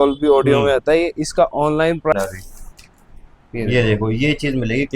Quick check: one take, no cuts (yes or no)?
no